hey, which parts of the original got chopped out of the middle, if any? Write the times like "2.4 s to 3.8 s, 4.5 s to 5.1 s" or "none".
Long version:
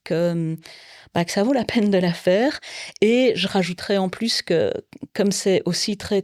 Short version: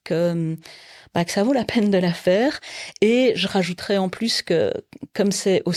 none